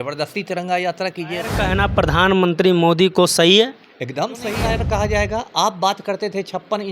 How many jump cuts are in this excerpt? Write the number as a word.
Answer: two